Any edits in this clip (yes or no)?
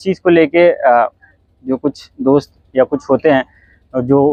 no